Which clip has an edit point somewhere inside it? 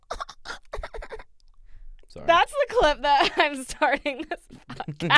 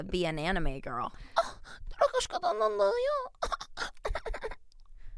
second; 1 cut; at 1.1 s

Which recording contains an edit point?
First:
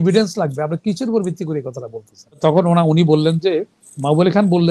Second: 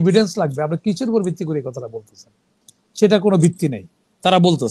first; 1 cut; at 2.4 s

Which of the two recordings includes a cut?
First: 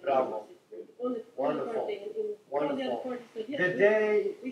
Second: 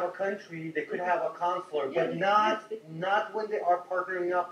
first; 1 cut; at 2.8 s

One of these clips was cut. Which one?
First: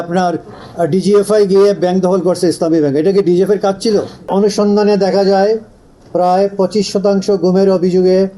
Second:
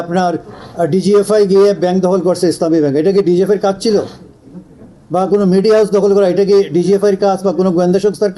first; 1 cut; at 4.2 s

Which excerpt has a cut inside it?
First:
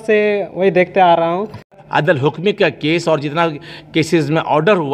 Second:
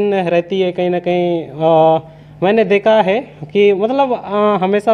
first; 1 cut; at 1.7 s

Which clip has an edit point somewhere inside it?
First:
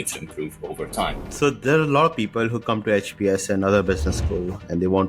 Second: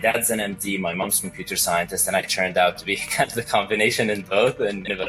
first; 1 cut; at 1.2 s

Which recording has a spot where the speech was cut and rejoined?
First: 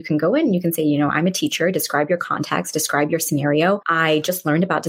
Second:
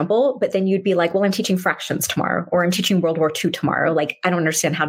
first; 1 cut; at 3.9 s

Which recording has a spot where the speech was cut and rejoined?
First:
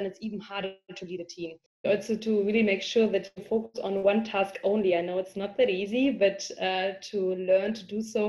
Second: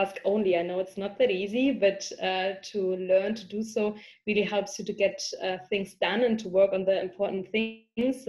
first; 1 cut; at 1.9 s

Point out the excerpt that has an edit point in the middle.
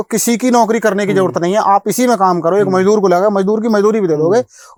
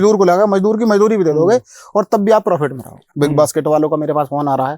second; 1 cut; at 3.0 s

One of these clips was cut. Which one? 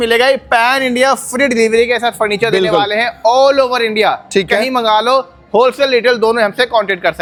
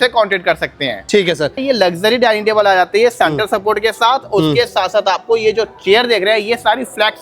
second; 1 cut; at 1.6 s

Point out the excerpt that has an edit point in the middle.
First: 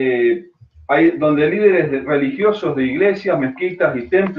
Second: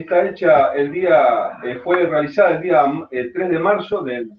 second; 1 cut; at 1.3 s

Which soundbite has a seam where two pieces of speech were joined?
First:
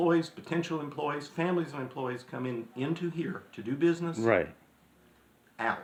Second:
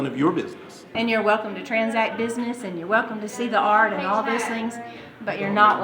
second; 1 cut; at 1.0 s

